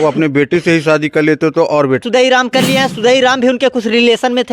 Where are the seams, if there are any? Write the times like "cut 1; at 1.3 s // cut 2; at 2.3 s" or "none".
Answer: cut 1; at 2.0 s